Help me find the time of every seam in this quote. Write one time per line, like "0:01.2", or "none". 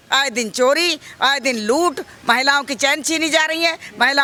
none

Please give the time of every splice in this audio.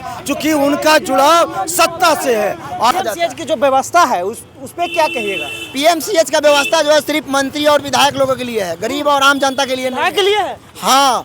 0:02.9

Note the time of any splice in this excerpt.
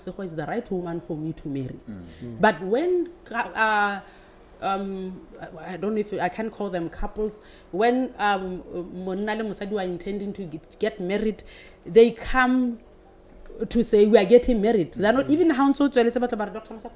none

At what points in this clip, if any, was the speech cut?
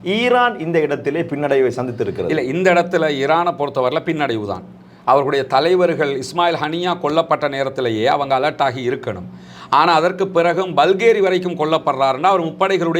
none

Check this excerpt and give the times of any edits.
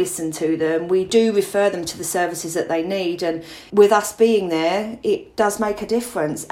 0:01.1
0:03.5
0:05.3

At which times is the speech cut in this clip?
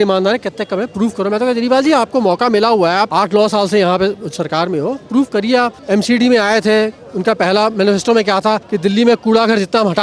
0:03.1
0:05.8
0:08.7

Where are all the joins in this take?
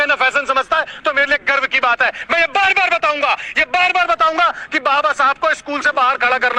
none

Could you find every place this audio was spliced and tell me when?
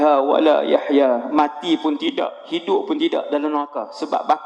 none

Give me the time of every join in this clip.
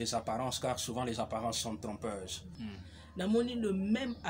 0:02.5

